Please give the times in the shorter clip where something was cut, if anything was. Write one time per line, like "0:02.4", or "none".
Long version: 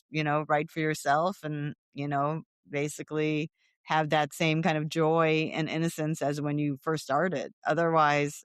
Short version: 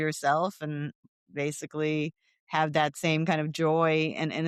0:01.1